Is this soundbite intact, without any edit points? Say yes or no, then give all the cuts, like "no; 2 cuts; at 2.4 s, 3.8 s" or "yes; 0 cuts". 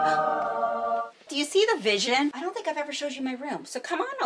no; 2 cuts; at 1.1 s, 2.4 s